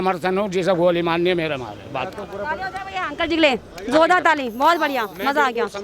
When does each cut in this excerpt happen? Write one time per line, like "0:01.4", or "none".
none